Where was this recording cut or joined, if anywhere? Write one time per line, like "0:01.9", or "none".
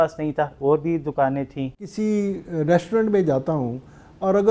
0:01.8